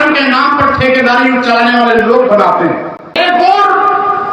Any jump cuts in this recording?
yes; 1 cut; at 3.1 s

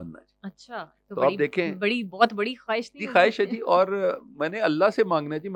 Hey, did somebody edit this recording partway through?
no; 0 cuts

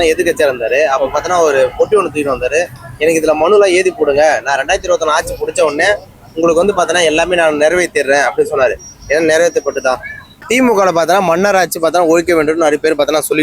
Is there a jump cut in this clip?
yes; 1 cut; at 10.5 s

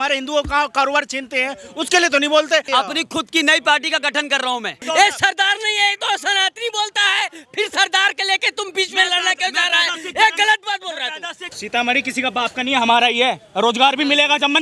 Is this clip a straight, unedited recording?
no; 3 cuts; at 2.7 s, 4.7 s, 11.4 s

